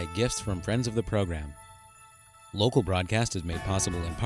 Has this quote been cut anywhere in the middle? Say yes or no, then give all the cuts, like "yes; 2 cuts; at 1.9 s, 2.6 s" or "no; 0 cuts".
no; 0 cuts